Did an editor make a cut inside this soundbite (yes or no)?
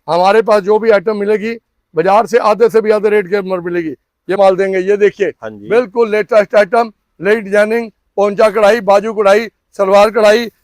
yes